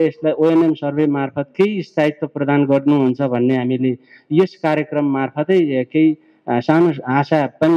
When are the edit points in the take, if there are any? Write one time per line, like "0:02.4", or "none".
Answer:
none